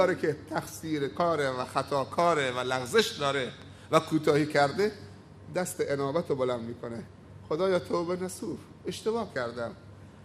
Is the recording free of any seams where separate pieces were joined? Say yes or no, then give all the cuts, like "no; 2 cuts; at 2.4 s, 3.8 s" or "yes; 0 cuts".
yes; 0 cuts